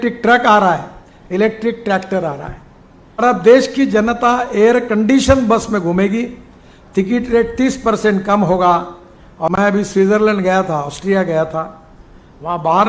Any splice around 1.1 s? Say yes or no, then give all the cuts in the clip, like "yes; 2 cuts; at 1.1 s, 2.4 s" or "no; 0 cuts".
no; 2 cuts; at 3.2 s, 9.5 s